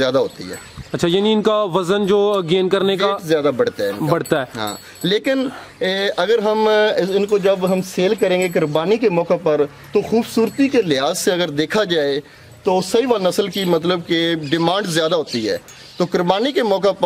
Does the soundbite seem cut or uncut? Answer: uncut